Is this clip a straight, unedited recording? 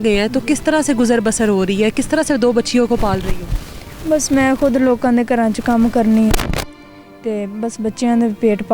yes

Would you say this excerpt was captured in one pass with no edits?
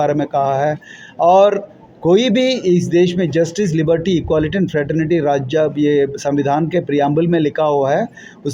yes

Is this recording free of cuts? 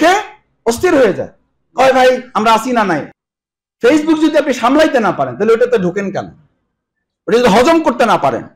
no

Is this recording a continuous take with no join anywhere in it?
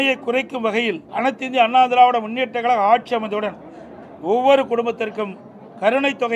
no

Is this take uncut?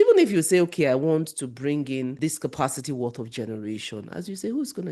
no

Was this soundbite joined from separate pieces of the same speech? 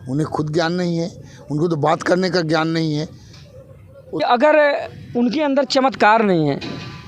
yes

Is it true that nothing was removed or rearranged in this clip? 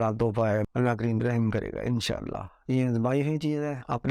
yes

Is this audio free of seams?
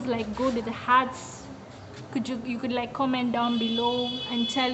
yes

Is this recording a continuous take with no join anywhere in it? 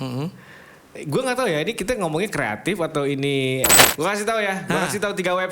no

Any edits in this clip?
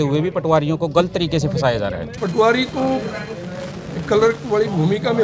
yes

